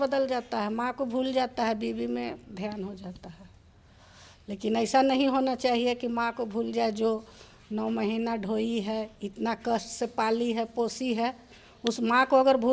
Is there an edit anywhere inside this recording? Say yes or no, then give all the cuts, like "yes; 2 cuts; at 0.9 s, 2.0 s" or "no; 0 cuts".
no; 0 cuts